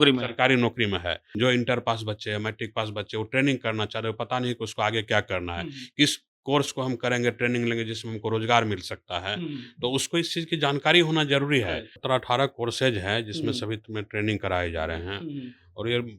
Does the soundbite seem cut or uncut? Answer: cut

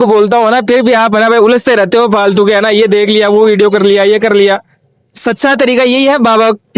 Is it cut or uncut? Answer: uncut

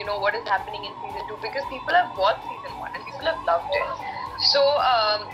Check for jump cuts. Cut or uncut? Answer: uncut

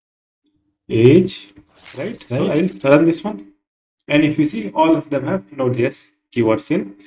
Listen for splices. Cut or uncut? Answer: cut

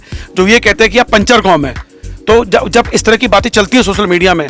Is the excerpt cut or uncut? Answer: uncut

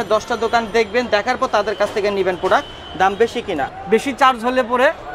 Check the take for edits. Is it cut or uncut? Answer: cut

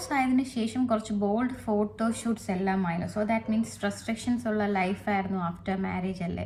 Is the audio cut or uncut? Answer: uncut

